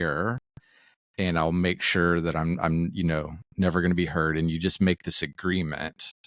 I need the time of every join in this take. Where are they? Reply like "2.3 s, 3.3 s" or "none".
none